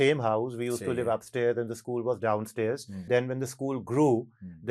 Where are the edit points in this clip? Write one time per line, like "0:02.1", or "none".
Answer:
0:03.0

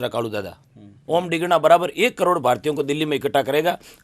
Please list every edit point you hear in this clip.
0:00.9

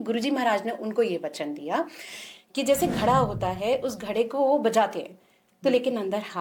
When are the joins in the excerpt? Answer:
none

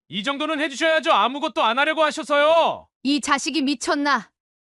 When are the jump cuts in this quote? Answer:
0:02.9

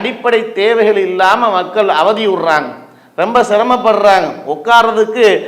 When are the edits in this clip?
none

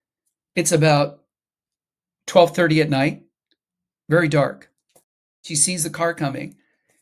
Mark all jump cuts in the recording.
0:05.5

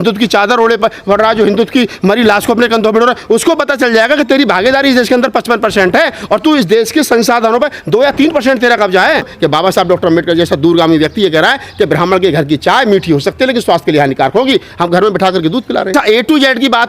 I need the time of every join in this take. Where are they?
0:09.3
0:15.9

